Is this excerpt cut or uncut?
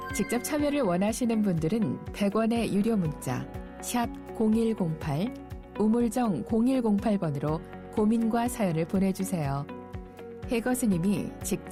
uncut